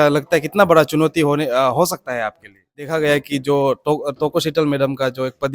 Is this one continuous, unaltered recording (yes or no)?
no